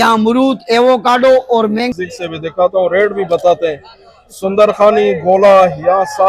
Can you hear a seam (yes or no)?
yes